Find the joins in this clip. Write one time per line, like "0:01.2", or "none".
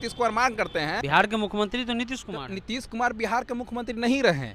0:01.0